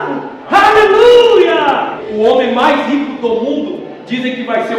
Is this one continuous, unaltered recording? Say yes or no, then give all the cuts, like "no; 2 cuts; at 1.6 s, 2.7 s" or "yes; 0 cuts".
no; 1 cut; at 2.0 s